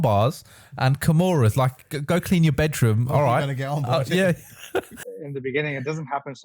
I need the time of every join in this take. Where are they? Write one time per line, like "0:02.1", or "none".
0:05.0